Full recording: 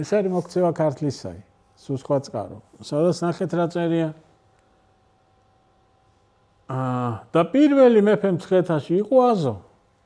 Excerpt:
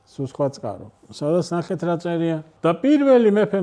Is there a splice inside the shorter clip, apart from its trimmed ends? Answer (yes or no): yes